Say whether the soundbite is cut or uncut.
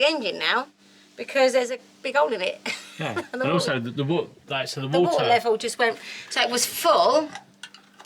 uncut